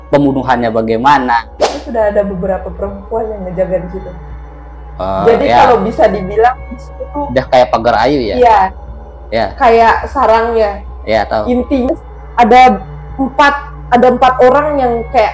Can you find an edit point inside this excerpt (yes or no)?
yes